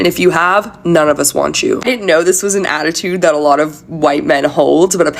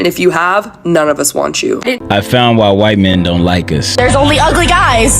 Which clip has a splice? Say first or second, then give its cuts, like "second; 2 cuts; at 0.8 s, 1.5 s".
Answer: second; 1 cut; at 2.0 s